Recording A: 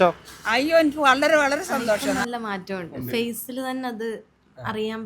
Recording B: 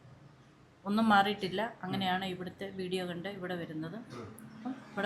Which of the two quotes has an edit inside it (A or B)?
A